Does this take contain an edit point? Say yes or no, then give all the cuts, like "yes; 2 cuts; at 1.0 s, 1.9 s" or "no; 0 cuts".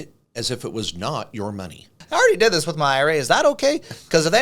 yes; 1 cut; at 2.0 s